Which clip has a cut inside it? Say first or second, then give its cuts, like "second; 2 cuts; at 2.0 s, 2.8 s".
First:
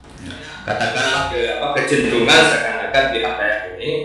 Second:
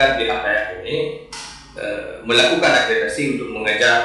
first; 1 cut; at 1.2 s